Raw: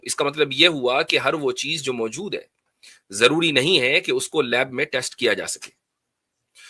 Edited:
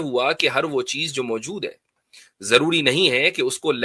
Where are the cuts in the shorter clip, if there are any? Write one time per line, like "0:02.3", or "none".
none